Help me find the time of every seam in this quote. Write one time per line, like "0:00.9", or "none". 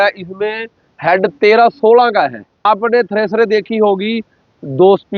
0:02.6